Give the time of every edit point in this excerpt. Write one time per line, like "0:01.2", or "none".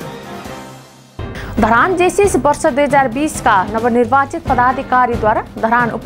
0:01.0